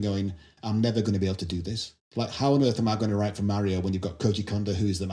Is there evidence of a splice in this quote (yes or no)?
no